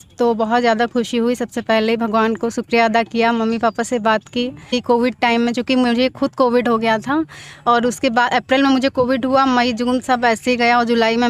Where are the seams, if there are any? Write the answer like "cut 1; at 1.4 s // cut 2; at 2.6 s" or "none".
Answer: cut 1; at 4.8 s